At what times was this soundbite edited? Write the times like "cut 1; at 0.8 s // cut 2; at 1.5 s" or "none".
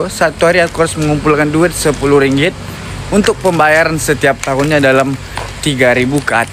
none